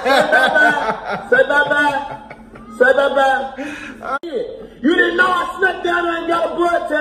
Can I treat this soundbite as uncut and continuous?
no; 1 cut; at 4.2 s

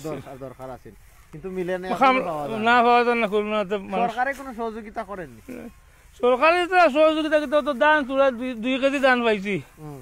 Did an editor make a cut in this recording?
no; 0 cuts

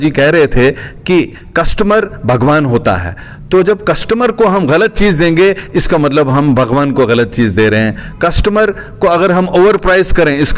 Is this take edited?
no; 0 cuts

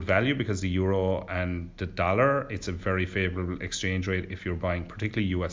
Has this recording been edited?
no; 0 cuts

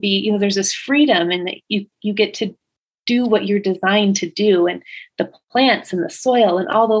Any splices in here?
no; 0 cuts

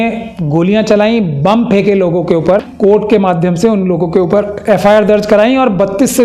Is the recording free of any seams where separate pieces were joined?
no; 1 cut; at 2.7 s

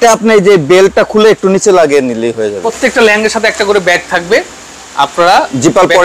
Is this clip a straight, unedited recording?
no; 1 cut; at 2.7 s

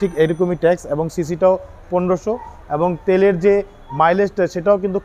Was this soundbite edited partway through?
no; 0 cuts

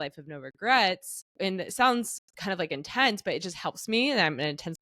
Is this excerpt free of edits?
no; 1 cut; at 1.2 s

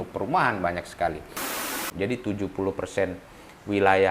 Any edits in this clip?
yes; 1 cut; at 1.6 s

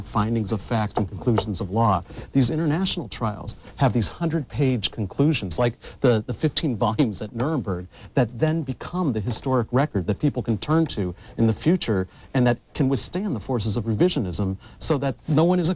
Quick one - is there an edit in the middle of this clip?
no; 0 cuts

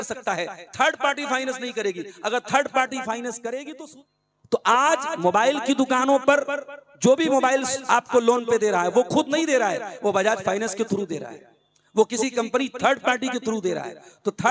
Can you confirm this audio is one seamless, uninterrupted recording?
no; 1 cut; at 3.7 s

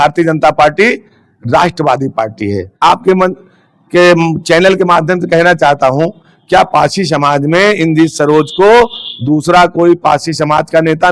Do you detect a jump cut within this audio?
yes; 1 cut; at 2.7 s

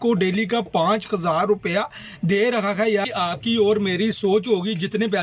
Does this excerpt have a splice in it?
yes; 1 cut; at 3.0 s

